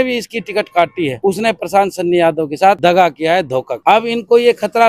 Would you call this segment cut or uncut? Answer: cut